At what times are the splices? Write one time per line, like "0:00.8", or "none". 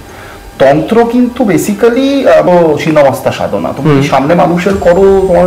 0:02.5